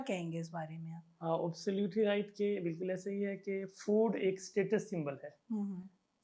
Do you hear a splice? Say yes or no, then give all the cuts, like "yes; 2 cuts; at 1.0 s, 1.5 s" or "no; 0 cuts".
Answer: no; 0 cuts